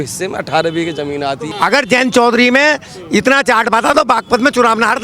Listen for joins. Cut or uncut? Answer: cut